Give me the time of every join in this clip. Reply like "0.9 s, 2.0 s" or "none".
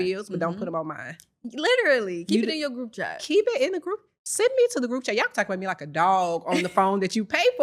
none